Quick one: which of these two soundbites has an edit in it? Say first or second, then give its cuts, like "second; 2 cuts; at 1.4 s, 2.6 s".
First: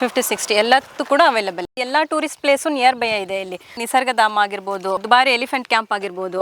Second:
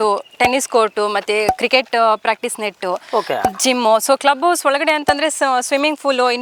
first; 2 cuts; at 1.7 s, 5.0 s